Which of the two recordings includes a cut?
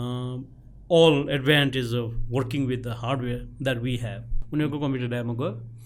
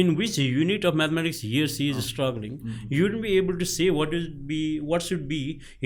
first; 1 cut; at 4.4 s

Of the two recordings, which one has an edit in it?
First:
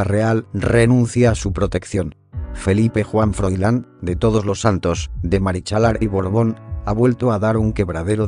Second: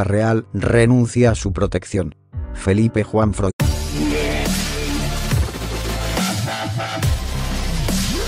first; 1 cut; at 3.5 s

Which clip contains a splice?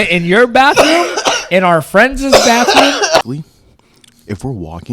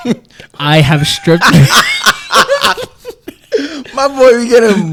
first; 1 cut; at 3.2 s

